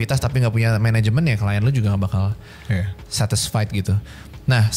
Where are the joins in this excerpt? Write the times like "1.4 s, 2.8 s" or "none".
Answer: none